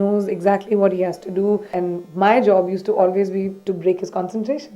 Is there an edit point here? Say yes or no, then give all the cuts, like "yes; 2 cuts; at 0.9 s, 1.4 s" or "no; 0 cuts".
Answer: yes; 1 cut; at 1.8 s